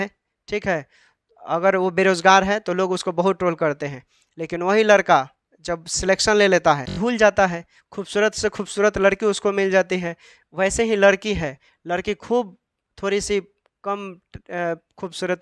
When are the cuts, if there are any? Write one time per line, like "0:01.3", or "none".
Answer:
0:06.9